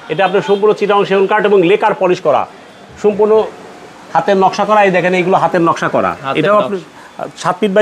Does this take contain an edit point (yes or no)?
no